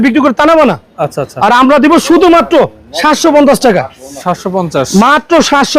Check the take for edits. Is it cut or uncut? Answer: uncut